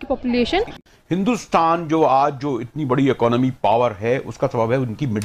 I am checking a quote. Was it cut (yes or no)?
yes